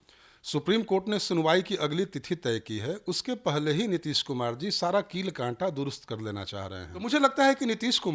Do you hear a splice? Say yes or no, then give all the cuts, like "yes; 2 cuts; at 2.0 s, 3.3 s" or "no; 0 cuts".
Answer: yes; 1 cut; at 7.1 s